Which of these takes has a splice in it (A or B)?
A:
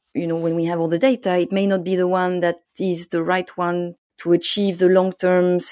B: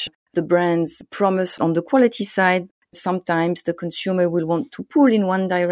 B